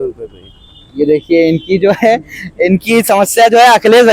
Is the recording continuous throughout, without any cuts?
yes; 0 cuts

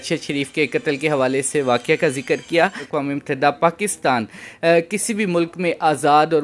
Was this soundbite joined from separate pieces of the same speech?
yes; 1 cut; at 2.9 s

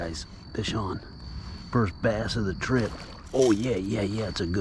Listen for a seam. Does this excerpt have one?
no; 0 cuts

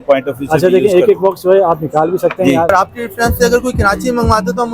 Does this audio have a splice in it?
yes; 1 cut; at 2.7 s

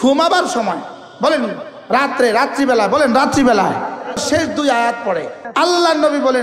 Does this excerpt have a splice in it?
yes; 2 cuts; at 4.2 s, 5.4 s

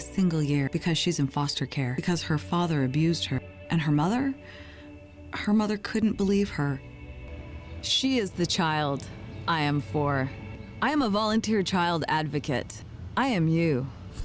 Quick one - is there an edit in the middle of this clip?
yes; 2 cuts; at 2.0 s, 3.5 s

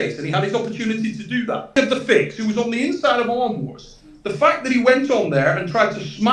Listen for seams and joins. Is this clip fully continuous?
no; 1 cut; at 1.8 s

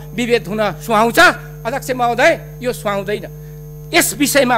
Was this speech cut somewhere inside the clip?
no; 0 cuts

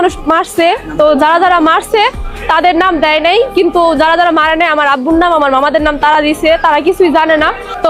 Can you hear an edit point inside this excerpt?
no; 0 cuts

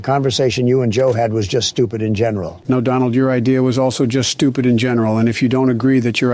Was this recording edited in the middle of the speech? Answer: yes; 1 cut; at 2.5 s

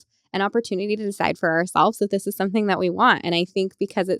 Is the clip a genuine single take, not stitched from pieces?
yes; 0 cuts

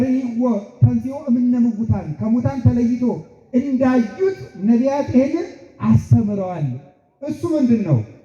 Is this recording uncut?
yes; 0 cuts

